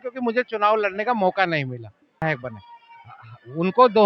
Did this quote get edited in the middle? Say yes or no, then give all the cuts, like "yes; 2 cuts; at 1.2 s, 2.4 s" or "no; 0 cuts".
yes; 1 cut; at 2.2 s